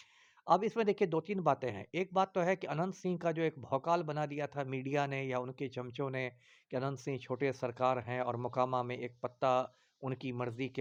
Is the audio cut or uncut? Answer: uncut